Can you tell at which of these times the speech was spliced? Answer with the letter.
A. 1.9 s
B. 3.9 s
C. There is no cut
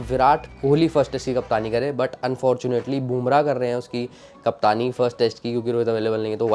C